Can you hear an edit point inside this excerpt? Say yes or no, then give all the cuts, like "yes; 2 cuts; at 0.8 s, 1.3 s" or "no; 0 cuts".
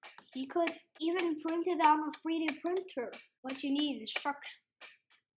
yes; 2 cuts; at 1.0 s, 3.3 s